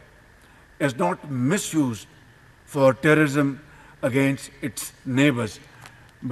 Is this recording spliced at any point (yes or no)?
no